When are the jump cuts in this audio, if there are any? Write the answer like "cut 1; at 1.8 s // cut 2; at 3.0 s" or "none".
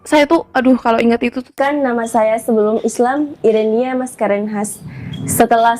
cut 1; at 1.5 s